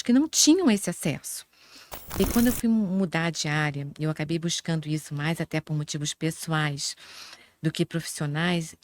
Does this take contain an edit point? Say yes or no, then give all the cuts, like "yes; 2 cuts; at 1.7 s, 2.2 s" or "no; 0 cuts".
yes; 1 cut; at 2.2 s